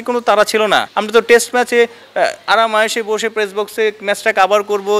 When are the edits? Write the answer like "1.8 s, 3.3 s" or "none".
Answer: 1.0 s